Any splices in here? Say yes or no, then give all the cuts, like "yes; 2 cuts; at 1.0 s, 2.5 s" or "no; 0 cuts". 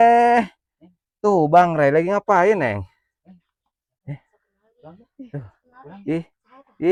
no; 0 cuts